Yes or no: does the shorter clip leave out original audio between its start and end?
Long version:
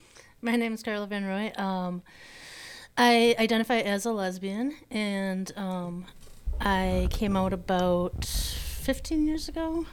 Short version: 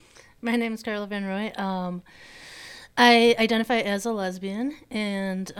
no